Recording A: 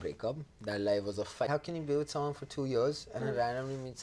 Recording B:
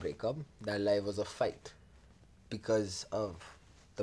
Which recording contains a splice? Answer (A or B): A